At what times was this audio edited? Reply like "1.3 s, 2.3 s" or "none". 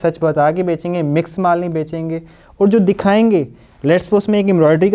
none